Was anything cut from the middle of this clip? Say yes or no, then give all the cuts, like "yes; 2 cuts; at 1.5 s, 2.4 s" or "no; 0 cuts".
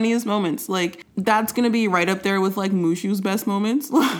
yes; 1 cut; at 1.0 s